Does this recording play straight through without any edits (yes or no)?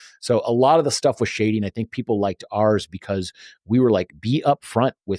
yes